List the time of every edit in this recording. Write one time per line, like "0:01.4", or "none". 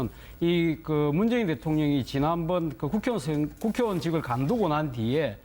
0:03.4

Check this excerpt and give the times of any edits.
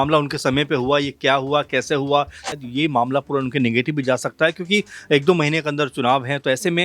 0:02.5

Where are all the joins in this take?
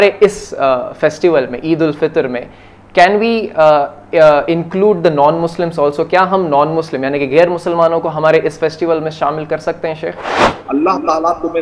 0:10.5

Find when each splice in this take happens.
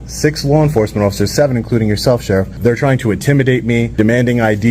0:02.5
0:03.9

